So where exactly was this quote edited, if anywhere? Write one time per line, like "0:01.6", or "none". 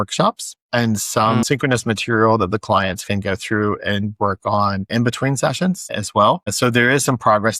0:01.4
0:04.9
0:06.5